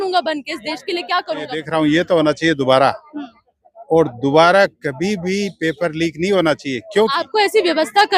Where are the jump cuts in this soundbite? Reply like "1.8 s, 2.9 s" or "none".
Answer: 1.5 s, 7.2 s